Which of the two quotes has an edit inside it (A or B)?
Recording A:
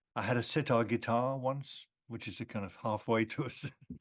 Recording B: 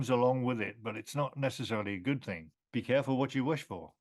B